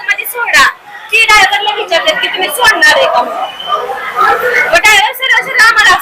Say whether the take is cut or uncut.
uncut